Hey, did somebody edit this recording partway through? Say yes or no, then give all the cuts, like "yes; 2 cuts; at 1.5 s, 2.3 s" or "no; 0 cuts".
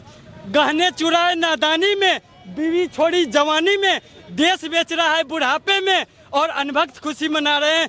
no; 0 cuts